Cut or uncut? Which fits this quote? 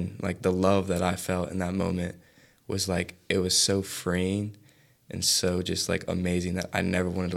uncut